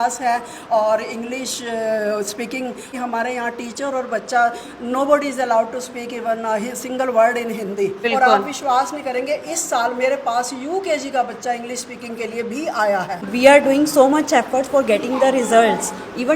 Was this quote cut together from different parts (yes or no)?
yes